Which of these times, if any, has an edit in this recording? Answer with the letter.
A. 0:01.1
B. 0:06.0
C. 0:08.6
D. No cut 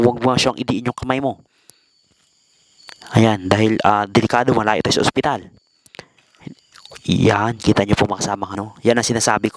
C